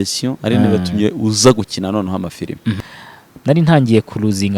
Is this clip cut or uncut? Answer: cut